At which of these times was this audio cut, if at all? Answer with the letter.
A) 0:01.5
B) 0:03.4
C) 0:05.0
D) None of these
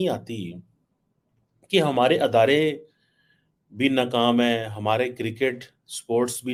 D